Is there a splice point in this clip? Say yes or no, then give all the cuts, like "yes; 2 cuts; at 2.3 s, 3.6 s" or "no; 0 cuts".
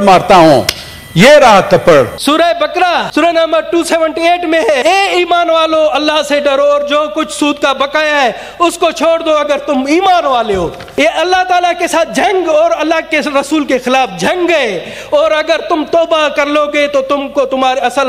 yes; 3 cuts; at 2.5 s, 4.8 s, 10.8 s